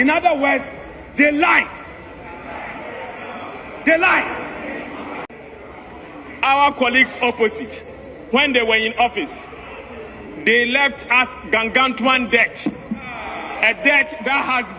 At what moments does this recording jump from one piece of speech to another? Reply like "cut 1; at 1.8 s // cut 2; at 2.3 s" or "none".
cut 1; at 5.4 s